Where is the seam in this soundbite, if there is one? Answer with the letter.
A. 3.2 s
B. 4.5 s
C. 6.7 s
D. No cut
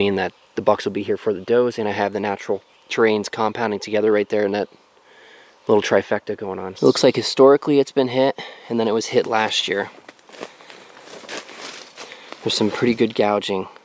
C